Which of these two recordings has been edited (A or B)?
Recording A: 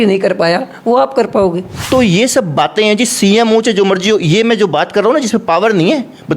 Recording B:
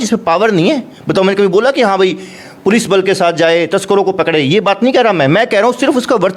A